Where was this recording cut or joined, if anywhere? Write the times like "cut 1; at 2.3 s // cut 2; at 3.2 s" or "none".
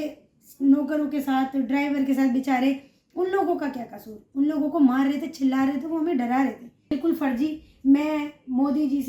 cut 1; at 6.9 s